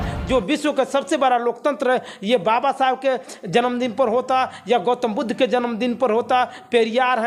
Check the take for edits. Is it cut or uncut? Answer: uncut